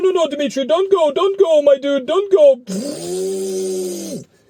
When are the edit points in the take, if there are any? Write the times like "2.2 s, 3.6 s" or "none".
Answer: none